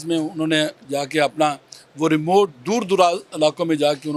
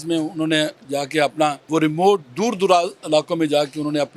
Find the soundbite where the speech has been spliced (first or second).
second